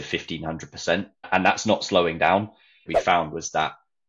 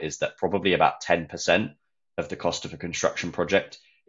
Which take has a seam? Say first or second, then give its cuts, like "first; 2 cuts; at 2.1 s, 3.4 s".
first; 2 cuts; at 1.3 s, 2.9 s